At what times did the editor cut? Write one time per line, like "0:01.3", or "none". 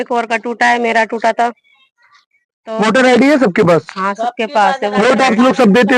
none